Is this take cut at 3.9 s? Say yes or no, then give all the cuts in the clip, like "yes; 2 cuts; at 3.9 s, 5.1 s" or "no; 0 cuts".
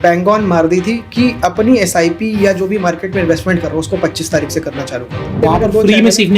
no; 1 cut; at 5.4 s